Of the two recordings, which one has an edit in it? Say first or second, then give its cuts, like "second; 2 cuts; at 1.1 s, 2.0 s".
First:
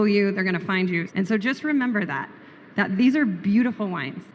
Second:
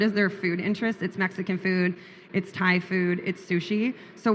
first; 1 cut; at 1.1 s